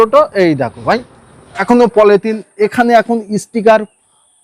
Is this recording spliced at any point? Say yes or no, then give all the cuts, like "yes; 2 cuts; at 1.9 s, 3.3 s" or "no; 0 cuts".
yes; 1 cut; at 1.3 s